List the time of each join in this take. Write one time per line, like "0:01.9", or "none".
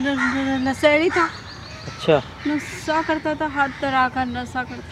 none